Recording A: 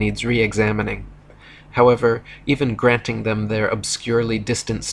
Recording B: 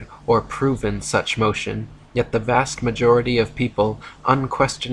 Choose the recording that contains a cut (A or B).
B